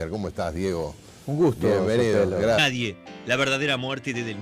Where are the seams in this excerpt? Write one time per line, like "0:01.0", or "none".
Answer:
none